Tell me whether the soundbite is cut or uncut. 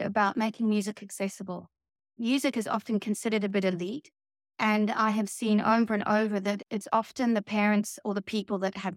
cut